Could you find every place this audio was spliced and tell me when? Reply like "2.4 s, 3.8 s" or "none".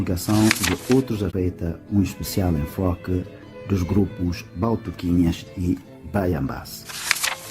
1.3 s